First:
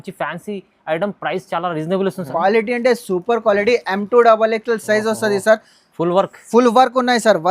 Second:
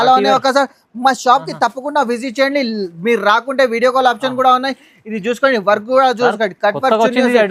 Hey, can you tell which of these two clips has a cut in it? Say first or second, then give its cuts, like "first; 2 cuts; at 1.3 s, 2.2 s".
first; 1 cut; at 2.2 s